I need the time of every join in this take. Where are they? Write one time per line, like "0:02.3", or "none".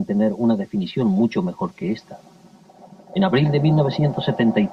0:02.0